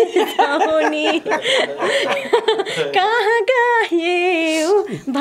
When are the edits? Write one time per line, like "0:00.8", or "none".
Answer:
none